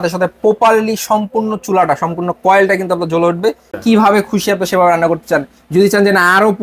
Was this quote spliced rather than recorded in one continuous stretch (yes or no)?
yes